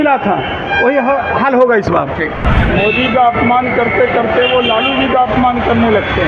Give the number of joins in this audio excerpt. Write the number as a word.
one